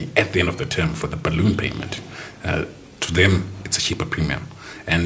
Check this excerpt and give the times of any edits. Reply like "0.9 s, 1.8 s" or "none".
none